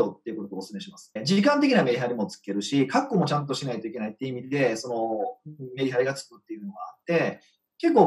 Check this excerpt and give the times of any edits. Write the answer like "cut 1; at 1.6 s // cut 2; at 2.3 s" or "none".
cut 1; at 1.1 s